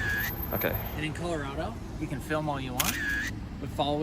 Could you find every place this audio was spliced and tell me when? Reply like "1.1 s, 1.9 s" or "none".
none